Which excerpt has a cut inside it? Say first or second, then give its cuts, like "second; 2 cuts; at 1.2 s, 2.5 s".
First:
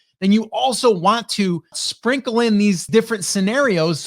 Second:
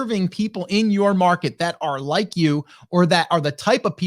first; 2 cuts; at 1.8 s, 2.9 s